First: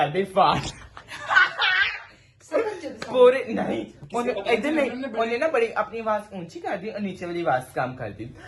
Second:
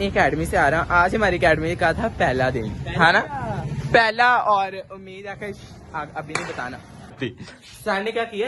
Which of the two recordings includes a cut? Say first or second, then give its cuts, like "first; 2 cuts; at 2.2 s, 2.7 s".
second; 1 cut; at 7.1 s